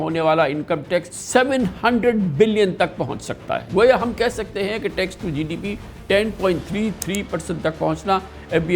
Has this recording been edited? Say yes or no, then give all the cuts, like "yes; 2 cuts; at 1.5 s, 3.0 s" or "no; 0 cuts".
yes; 2 cuts; at 1.2 s, 3.7 s